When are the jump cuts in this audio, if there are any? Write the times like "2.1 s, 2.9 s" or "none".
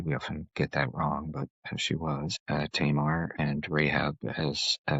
2.4 s, 3.3 s